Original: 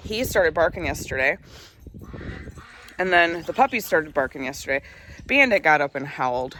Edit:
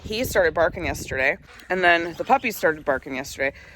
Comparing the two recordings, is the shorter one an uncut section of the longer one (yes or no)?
no